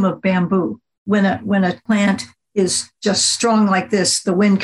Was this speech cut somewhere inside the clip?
yes; 3 cuts; at 1.0 s, 1.8 s, 2.9 s

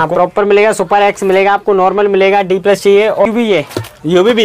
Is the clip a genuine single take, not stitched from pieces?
no; 1 cut; at 3.3 s

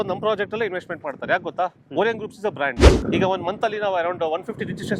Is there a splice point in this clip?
yes; 1 cut; at 2.9 s

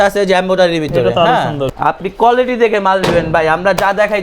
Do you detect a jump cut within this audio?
yes; 1 cut; at 1.7 s

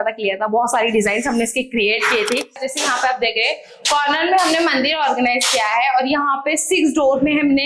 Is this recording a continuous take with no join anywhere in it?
no; 1 cut; at 2.7 s

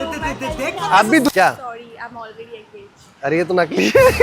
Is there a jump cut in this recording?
yes; 1 cut; at 1.3 s

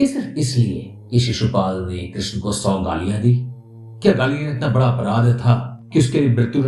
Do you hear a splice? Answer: no; 0 cuts

